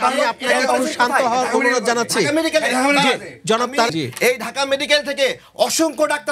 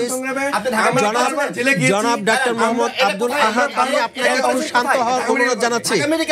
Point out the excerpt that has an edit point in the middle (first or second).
first